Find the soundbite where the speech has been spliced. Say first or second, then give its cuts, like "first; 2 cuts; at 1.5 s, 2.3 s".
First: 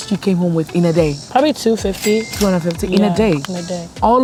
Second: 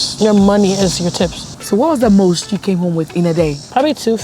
second; 1 cut; at 1.5 s